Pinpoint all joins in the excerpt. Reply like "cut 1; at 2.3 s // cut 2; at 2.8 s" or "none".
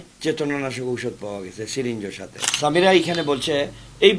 cut 1; at 2.4 s

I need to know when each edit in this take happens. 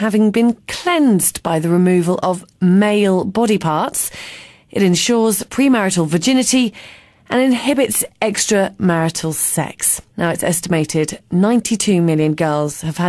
cut 1; at 3.3 s

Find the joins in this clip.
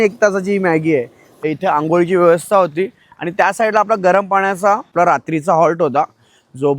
cut 1; at 1.4 s // cut 2; at 4.9 s

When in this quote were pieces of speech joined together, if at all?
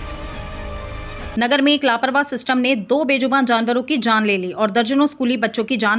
cut 1; at 1.3 s

